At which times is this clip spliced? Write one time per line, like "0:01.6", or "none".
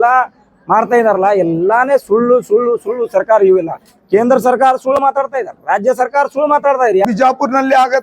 0:07.0